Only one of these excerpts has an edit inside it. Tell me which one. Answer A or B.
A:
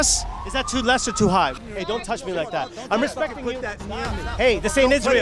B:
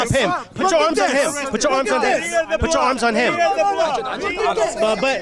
A